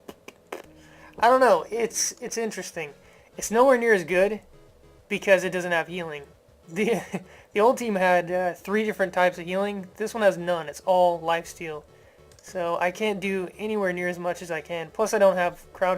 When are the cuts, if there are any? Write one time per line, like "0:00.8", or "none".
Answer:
0:05.5